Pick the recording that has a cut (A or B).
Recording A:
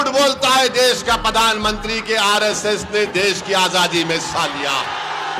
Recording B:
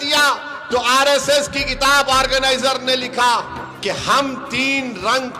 B